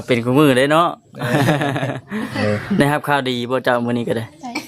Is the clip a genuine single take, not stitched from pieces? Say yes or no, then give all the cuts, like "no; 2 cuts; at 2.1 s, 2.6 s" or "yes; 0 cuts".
no; 1 cut; at 2.3 s